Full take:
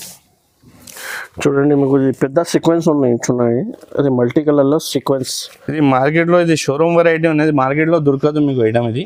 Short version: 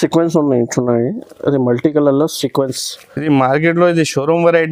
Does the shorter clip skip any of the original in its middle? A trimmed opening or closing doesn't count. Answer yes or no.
no